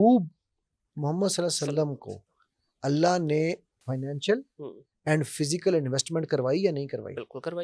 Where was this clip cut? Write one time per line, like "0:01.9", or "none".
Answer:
none